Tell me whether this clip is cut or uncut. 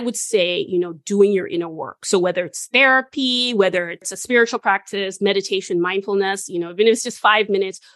cut